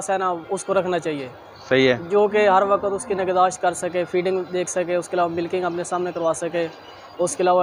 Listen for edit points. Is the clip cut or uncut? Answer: uncut